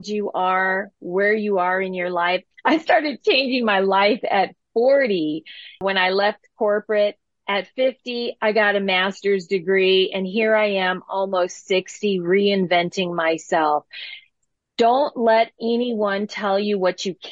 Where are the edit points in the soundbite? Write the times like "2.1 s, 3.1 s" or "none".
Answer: 2.5 s, 5.8 s

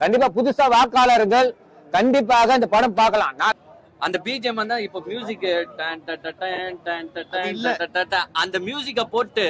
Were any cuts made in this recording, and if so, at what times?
3.5 s

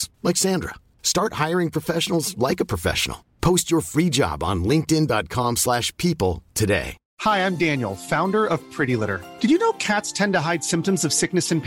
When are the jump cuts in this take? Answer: 7.0 s

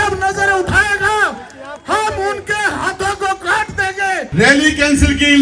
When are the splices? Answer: 4.2 s

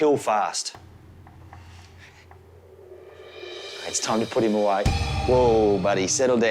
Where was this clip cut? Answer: none

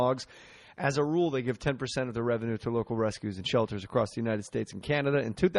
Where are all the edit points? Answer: none

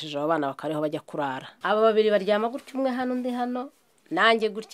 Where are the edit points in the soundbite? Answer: 1.5 s

